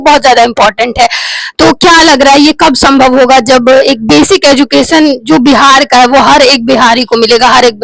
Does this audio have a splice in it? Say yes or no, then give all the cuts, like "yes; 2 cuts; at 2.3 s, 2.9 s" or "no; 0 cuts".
no; 0 cuts